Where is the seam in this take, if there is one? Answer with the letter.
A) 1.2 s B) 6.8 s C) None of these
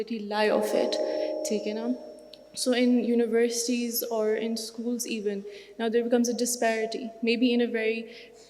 C